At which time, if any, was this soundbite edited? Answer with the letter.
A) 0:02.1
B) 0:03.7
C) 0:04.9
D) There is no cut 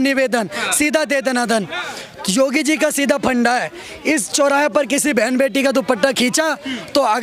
D